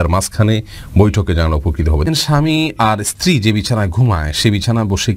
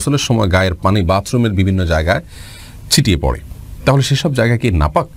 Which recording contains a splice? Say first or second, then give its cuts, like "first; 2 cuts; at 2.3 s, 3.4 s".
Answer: first; 1 cut; at 2.1 s